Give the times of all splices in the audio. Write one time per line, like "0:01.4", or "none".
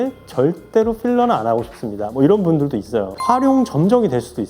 0:03.2